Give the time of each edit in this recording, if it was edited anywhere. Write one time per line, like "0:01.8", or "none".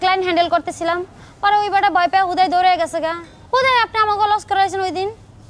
none